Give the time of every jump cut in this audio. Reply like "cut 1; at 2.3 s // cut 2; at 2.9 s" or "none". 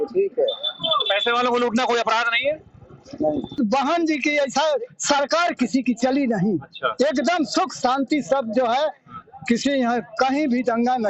cut 1; at 3.6 s